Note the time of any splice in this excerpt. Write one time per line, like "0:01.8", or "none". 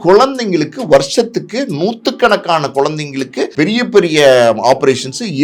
0:03.5

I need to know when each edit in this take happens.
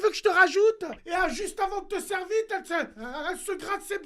0:01.0

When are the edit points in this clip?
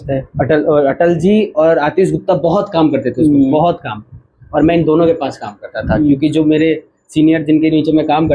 none

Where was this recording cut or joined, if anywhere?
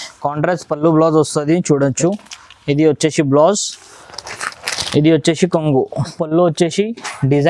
0:06.1

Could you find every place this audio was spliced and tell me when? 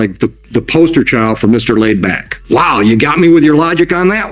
0:02.4

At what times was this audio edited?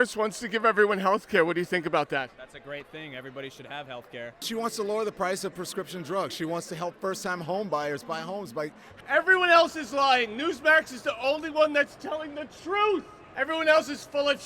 0:04.3
0:08.9
0:13.2

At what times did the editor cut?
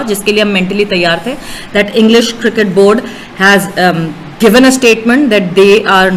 none

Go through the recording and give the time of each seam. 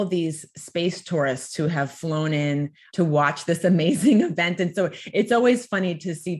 0:02.8

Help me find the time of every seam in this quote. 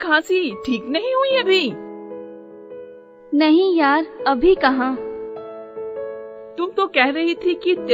0:01.8
0:03.1

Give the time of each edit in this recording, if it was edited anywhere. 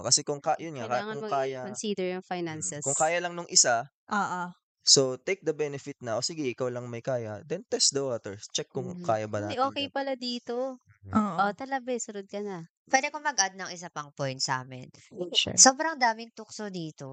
none

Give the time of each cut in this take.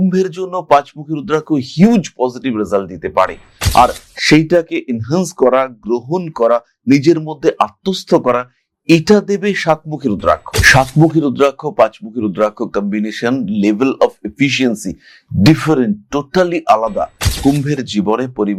none

